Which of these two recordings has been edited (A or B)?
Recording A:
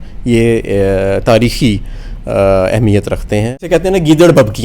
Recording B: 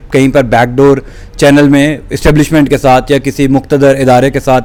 A